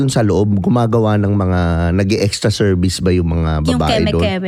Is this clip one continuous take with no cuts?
yes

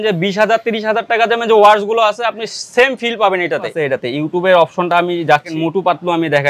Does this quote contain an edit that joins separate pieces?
yes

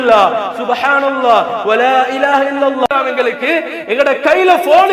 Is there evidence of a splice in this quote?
yes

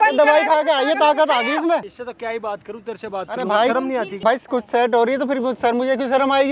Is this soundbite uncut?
no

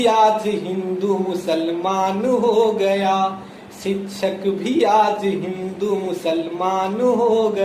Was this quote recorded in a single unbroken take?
yes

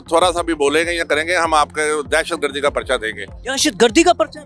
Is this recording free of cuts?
yes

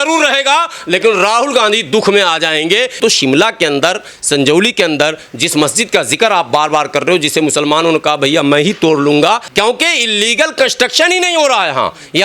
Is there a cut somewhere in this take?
yes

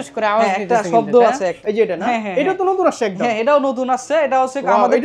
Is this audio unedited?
no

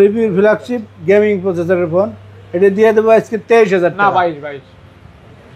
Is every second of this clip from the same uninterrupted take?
yes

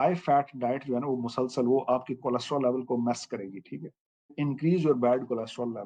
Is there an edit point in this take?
yes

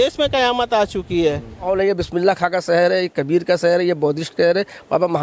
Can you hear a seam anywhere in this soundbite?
yes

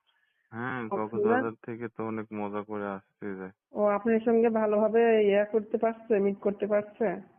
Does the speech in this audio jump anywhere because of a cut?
yes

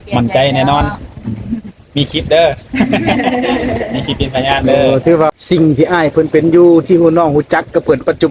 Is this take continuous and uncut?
no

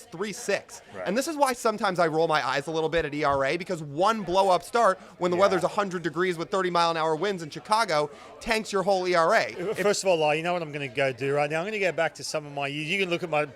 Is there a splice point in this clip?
yes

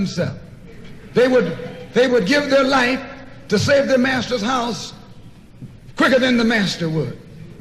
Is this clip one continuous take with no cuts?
yes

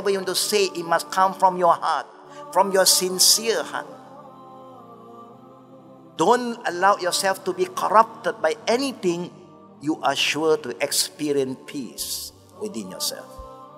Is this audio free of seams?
yes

